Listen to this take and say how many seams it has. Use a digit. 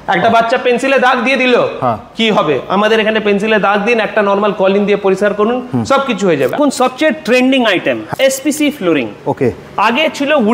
2